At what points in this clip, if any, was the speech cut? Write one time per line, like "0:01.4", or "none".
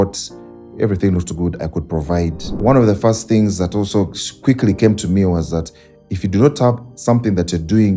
0:02.5